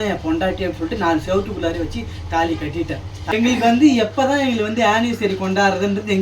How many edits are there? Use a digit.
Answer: 1